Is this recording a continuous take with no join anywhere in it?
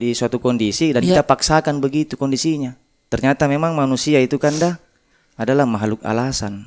no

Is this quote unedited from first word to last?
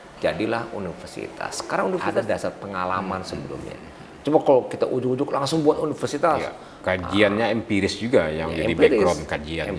no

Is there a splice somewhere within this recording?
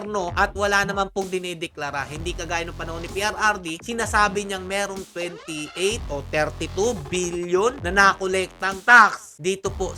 no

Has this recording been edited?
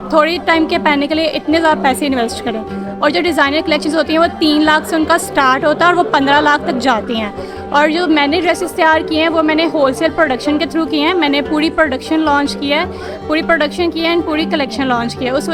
no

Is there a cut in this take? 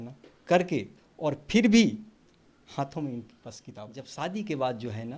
yes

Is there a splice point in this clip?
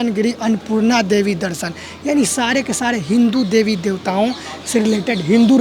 no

